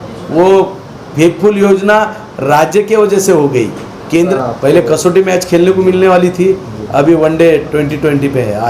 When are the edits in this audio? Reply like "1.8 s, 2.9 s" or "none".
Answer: 4.3 s